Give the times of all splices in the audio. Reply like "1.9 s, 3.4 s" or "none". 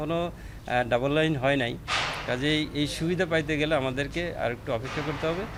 none